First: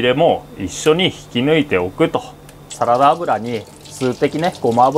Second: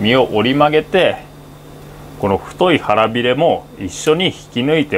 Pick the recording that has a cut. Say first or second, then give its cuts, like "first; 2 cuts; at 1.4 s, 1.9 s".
first; 1 cut; at 2.7 s